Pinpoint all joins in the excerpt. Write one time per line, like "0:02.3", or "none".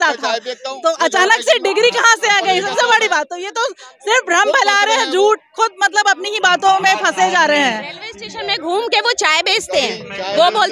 none